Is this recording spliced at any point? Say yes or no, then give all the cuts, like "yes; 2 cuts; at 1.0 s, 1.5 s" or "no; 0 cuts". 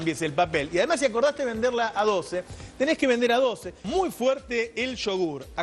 no; 0 cuts